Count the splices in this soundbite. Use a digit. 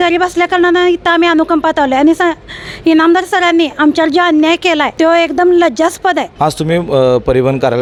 0